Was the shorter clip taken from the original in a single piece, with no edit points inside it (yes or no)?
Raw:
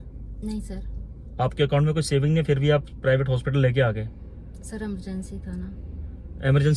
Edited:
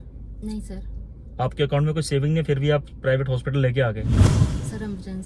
yes